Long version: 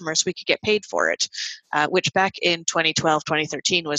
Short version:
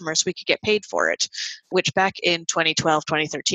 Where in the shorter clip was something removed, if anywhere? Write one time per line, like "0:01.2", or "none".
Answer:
0:01.7